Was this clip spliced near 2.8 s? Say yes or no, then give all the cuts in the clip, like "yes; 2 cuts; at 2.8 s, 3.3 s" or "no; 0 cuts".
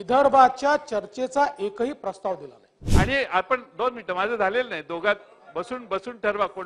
yes; 1 cut; at 2.8 s